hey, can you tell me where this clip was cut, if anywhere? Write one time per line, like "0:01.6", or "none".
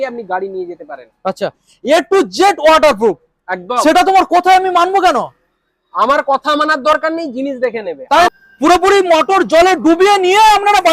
0:01.7
0:08.3